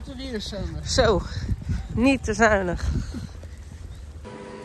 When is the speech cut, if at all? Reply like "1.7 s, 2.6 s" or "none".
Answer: none